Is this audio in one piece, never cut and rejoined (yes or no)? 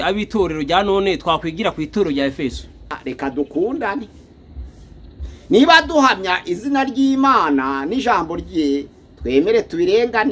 no